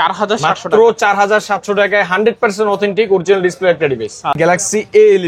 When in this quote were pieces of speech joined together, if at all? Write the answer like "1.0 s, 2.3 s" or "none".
4.4 s